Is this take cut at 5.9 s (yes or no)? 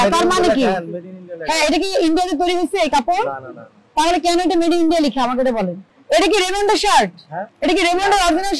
yes